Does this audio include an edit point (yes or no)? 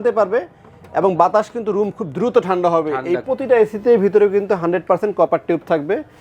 yes